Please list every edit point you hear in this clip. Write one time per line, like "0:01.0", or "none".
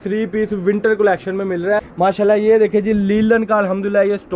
0:01.9